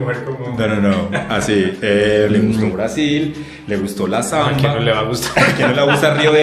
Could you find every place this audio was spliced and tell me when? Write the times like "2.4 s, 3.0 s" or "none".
2.7 s